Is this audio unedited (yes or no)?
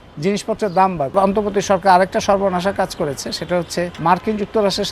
no